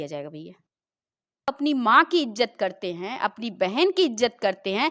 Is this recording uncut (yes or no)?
no